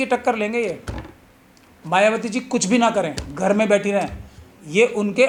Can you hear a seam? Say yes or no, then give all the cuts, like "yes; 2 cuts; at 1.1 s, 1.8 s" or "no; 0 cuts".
no; 0 cuts